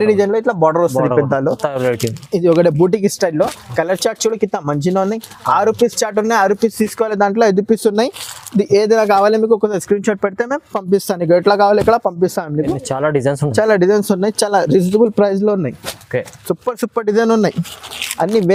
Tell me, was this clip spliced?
no; 0 cuts

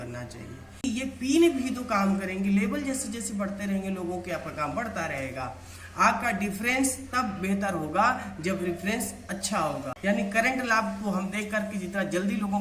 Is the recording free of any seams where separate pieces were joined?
no; 2 cuts; at 0.8 s, 9.9 s

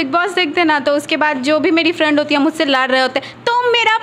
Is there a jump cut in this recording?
no; 0 cuts

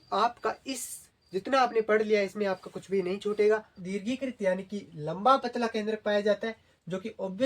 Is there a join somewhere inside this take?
yes; 1 cut; at 3.8 s

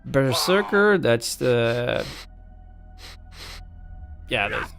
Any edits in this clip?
no; 0 cuts

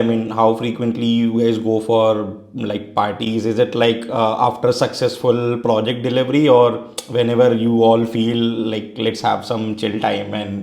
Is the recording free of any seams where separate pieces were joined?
yes; 0 cuts

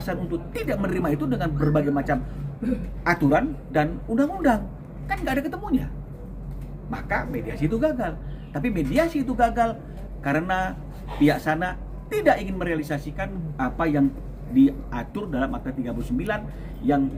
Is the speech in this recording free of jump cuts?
yes; 0 cuts

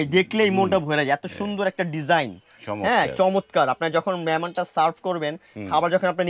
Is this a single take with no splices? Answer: yes; 0 cuts

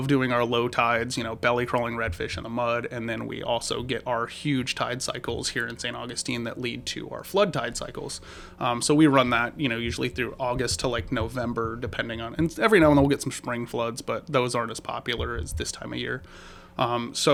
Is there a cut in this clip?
no; 0 cuts

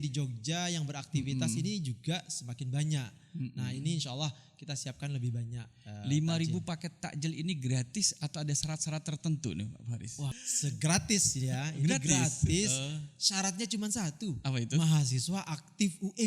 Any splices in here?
yes; 1 cut; at 10.4 s

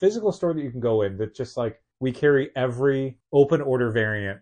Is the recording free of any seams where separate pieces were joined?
no; 2 cuts; at 1.9 s, 3.2 s

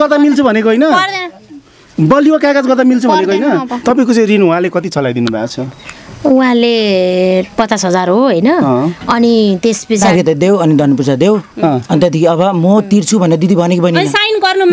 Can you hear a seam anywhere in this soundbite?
yes; 2 cuts; at 3.7 s, 10.0 s

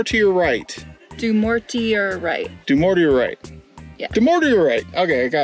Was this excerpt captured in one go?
yes; 0 cuts

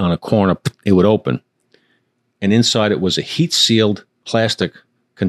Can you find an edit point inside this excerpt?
yes; 1 cut; at 4.2 s

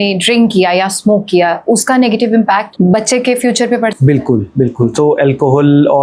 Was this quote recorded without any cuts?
no; 1 cut; at 2.7 s

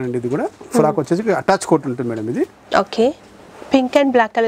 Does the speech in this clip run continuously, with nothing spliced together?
yes; 0 cuts

